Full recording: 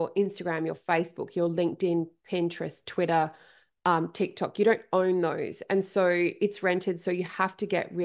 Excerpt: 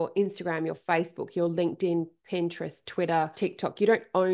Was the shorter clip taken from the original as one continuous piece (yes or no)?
no